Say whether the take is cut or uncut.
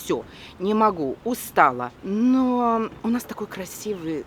cut